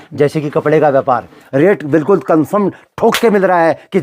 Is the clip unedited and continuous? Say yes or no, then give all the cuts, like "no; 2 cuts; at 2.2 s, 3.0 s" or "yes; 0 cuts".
no; 1 cut; at 1.4 s